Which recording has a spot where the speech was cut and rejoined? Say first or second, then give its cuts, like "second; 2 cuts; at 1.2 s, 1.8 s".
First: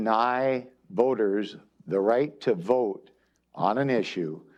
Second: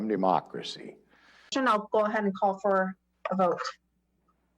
second; 1 cut; at 1.5 s